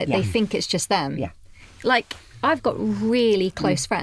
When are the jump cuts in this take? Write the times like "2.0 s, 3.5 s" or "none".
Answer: none